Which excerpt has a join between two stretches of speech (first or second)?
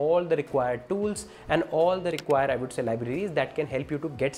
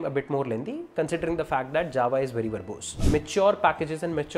second